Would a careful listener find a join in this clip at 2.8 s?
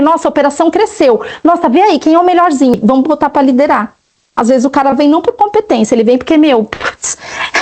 yes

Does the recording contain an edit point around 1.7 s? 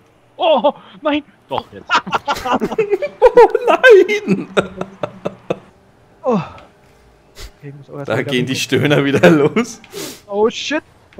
no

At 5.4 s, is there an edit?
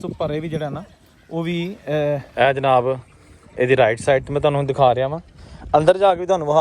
no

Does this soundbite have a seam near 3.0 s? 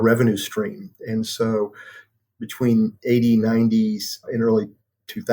no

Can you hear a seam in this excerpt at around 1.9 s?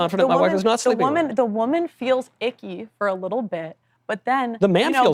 no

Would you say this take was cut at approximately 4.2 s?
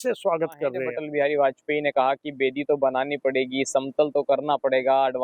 no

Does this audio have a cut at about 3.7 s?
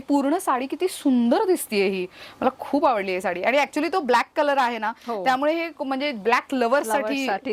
no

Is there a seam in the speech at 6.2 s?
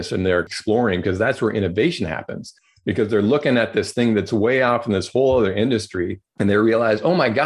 yes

